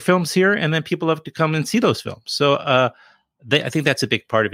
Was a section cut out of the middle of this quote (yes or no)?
no